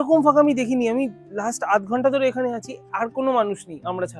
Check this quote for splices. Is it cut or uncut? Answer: uncut